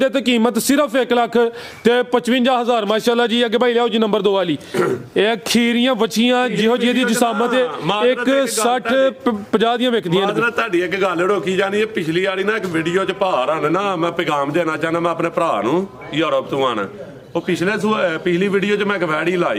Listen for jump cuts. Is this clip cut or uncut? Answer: uncut